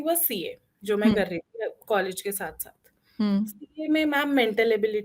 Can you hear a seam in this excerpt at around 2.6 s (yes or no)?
no